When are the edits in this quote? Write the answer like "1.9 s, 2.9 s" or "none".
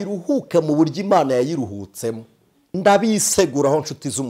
2.7 s

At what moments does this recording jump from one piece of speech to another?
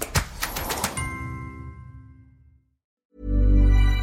3.0 s

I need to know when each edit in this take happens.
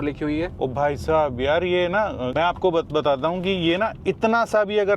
2.3 s

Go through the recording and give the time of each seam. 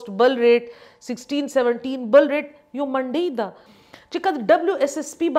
3.6 s

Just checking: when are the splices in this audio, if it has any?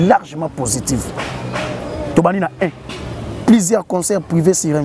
none

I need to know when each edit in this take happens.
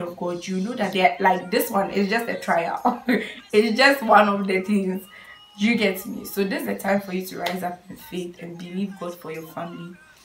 none

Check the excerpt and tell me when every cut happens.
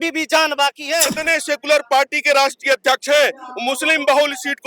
1.2 s

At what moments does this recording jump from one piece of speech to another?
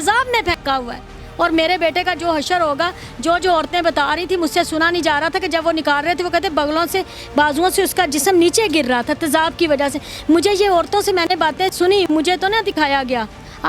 none

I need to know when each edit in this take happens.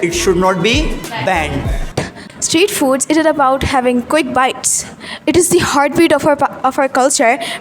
2.0 s

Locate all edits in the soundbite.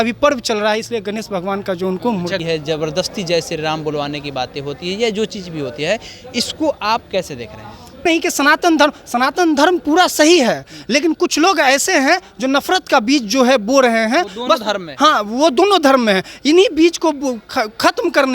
2.4 s, 8.0 s

